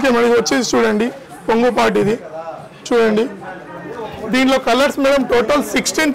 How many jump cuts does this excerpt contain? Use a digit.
0